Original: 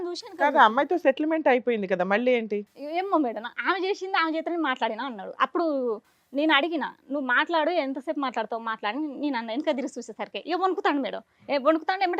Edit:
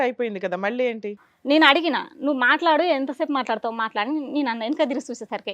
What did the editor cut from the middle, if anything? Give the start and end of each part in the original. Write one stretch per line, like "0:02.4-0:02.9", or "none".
0:02.7-0:06.1